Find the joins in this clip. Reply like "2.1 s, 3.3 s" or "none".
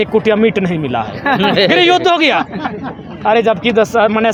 none